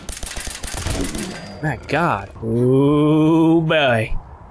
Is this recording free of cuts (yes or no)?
no